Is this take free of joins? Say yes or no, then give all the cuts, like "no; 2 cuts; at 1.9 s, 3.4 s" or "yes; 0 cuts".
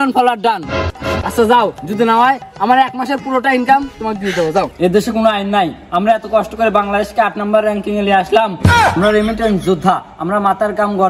no; 1 cut; at 4.7 s